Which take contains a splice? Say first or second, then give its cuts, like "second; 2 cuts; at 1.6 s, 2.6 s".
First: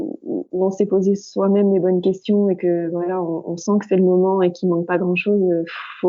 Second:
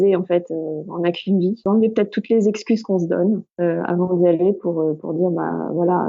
second; 2 cuts; at 1.6 s, 3.5 s